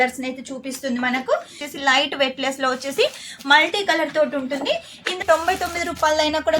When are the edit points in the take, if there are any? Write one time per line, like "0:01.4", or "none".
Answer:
0:01.7
0:05.2